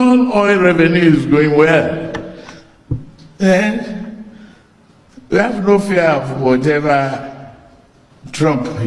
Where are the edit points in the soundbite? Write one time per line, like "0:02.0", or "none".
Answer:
none